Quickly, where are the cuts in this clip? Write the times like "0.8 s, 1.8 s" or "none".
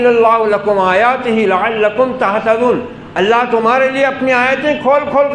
none